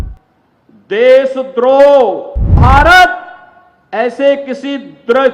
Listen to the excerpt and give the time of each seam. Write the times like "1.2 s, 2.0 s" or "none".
2.5 s